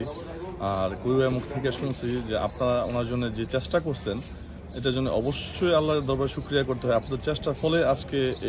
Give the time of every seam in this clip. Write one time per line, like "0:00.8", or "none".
none